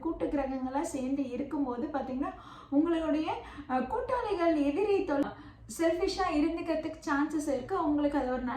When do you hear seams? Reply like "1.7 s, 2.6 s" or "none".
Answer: 5.2 s